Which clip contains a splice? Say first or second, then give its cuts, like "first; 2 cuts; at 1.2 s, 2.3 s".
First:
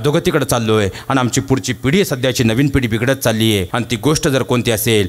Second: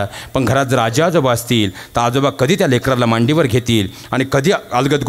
first; 1 cut; at 3.7 s